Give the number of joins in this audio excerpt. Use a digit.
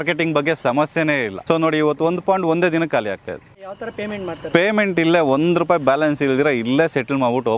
2